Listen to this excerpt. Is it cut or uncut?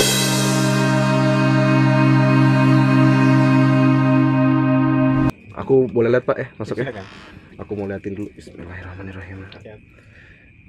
cut